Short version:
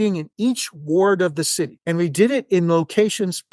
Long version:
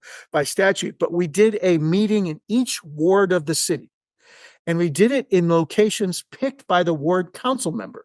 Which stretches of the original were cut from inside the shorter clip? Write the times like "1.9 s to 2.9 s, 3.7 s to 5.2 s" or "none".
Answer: 3.9 s to 4.6 s